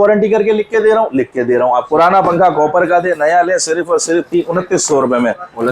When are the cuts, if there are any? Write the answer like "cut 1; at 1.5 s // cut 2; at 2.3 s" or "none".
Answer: cut 1; at 1.8 s